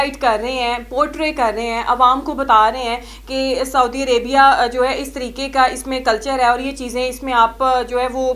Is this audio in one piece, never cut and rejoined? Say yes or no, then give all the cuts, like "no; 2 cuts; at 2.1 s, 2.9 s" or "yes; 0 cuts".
yes; 0 cuts